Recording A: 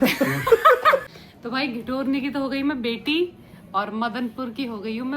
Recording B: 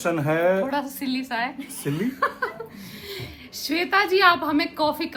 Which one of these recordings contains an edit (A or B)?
A